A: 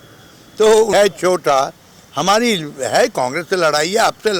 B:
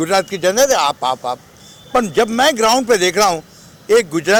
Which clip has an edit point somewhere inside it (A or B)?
A